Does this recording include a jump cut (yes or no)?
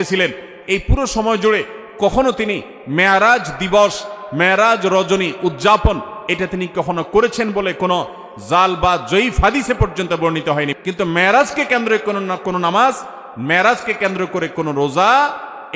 yes